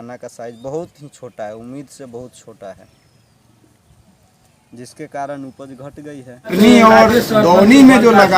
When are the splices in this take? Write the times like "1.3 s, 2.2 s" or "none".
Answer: 6.5 s